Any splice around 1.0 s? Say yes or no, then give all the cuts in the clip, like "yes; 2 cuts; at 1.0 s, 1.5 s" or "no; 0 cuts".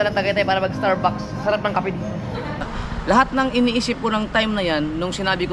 no; 1 cut; at 2.7 s